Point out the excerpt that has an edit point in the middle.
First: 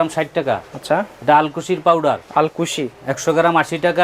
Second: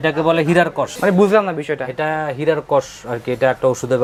first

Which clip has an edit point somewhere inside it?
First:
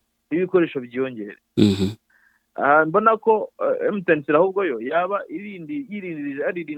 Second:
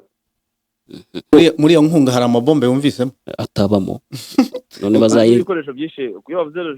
second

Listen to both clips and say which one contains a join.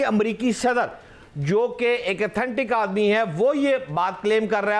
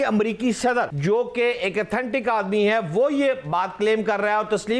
second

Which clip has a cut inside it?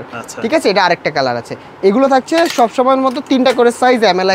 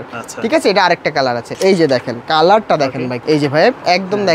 second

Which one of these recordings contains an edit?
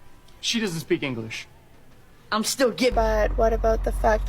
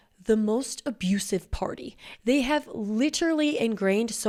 first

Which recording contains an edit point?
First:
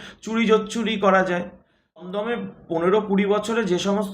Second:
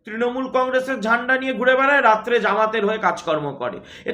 first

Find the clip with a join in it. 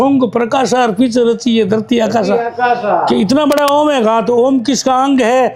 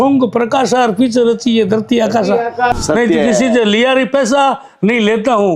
second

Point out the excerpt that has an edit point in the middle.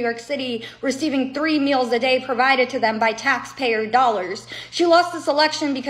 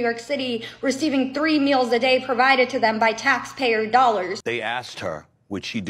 second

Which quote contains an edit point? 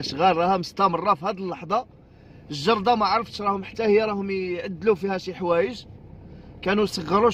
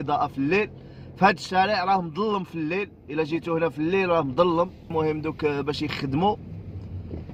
second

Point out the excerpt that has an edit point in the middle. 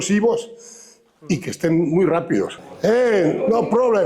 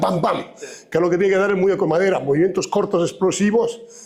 first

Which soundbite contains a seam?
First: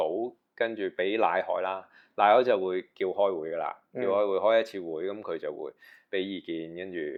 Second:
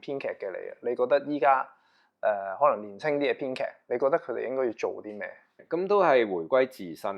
second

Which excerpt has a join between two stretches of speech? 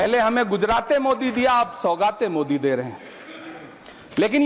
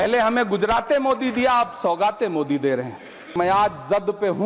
second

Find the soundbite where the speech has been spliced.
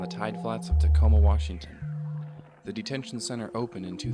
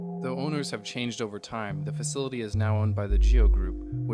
second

